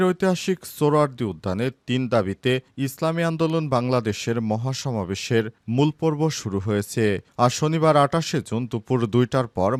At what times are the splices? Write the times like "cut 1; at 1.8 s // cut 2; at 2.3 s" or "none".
none